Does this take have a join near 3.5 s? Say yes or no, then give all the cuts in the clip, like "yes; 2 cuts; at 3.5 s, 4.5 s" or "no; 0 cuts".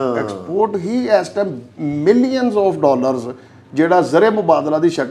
no; 0 cuts